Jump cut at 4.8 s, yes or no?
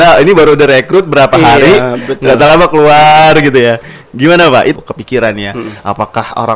yes